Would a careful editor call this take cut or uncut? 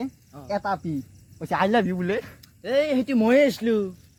uncut